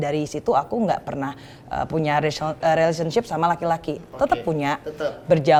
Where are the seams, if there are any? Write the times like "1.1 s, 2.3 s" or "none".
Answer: none